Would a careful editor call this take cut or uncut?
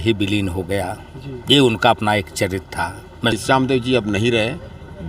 cut